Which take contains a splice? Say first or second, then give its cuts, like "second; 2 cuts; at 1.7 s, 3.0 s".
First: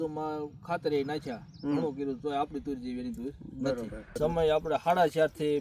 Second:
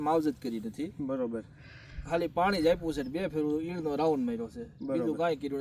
first; 1 cut; at 4.1 s